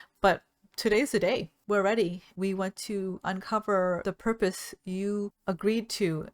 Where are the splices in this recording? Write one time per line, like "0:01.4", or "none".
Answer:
0:01.5
0:02.2
0:04.0
0:05.4